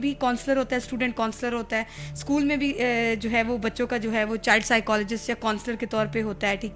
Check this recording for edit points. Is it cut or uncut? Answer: uncut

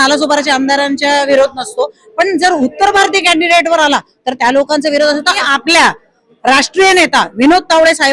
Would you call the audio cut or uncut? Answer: cut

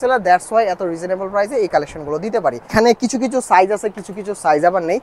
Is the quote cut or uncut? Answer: cut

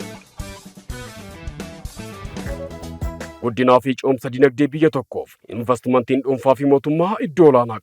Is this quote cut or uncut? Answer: cut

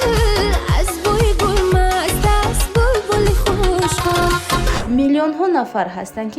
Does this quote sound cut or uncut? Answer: cut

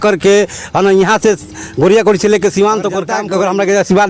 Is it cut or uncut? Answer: cut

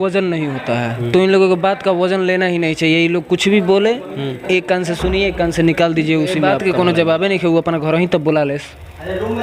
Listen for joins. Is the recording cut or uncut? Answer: cut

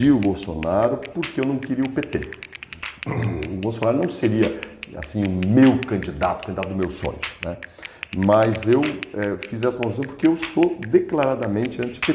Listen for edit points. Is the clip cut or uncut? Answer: uncut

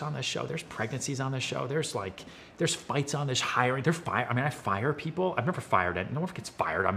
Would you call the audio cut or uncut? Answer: uncut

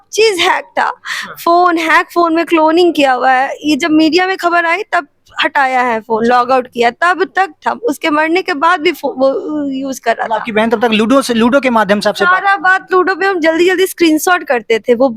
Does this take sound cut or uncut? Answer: uncut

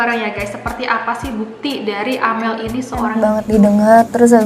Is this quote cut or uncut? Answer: cut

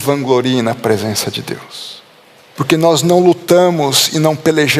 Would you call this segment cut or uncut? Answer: cut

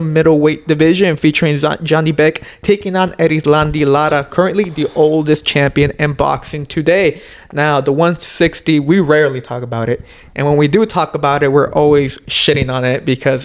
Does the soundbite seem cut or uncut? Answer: uncut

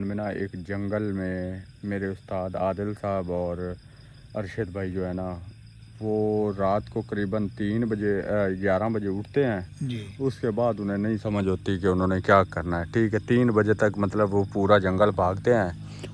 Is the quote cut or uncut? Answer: uncut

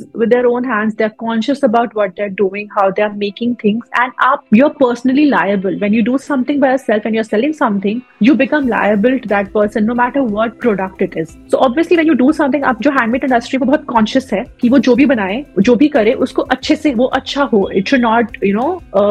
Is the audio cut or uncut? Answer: uncut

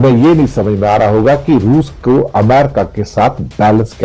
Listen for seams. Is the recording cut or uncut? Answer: uncut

